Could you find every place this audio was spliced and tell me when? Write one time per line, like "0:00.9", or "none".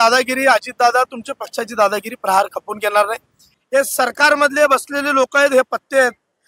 0:03.5